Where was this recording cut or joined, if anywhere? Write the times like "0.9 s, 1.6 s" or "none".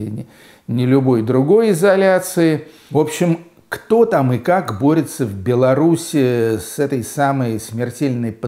2.7 s